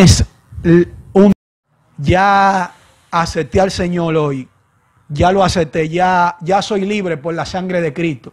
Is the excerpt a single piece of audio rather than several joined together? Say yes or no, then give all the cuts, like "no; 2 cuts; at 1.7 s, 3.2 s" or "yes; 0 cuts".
no; 1 cut; at 1.3 s